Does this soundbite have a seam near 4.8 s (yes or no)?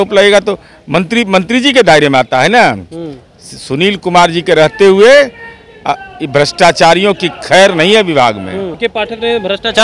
no